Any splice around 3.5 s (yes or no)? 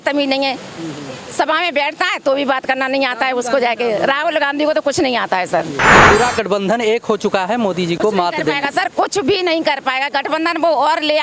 no